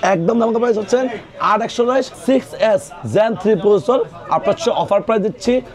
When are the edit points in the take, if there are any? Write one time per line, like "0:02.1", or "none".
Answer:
0:02.1